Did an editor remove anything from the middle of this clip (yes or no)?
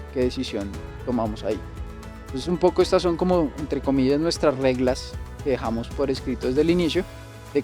no